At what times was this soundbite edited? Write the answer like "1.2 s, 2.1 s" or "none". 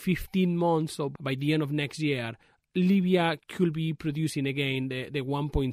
1.1 s